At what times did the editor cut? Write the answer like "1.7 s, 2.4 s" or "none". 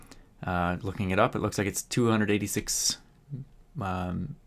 1.8 s